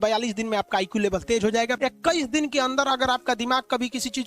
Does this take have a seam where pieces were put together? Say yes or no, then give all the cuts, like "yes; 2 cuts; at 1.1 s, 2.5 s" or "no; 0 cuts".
yes; 1 cut; at 1.7 s